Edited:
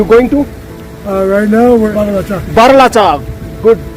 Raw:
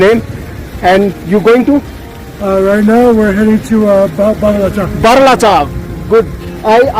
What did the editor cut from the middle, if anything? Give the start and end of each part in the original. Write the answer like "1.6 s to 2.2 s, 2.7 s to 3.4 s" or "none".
3.3 s to 4.4 s